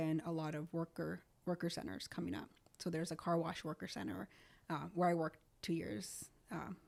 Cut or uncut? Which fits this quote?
uncut